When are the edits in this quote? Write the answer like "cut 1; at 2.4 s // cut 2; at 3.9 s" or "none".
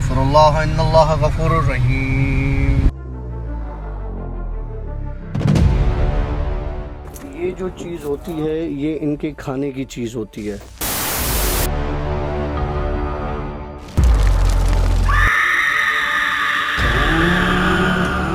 none